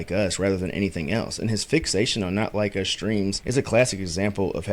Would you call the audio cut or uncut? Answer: cut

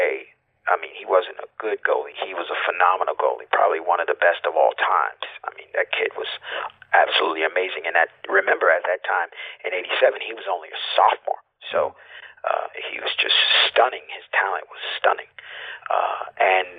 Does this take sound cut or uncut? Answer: uncut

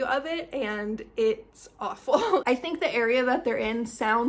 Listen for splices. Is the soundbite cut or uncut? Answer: cut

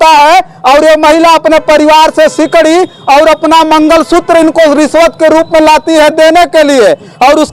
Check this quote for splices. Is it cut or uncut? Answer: uncut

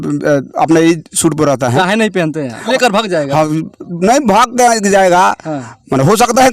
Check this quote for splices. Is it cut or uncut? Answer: cut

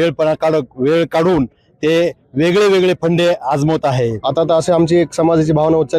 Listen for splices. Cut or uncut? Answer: cut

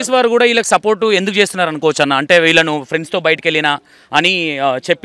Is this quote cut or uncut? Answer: uncut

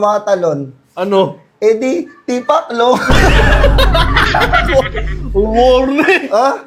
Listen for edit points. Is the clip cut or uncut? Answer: uncut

